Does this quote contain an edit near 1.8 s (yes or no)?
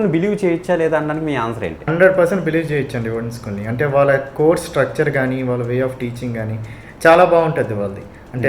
yes